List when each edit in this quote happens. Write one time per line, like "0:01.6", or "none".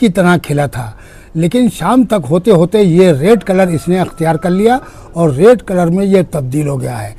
none